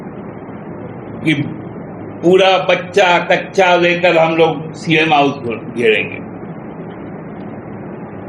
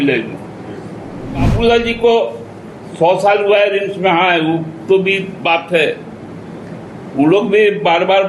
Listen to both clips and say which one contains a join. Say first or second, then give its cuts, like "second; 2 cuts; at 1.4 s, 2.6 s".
second; 1 cut; at 1.5 s